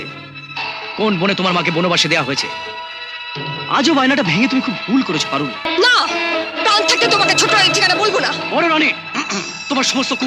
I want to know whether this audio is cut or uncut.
cut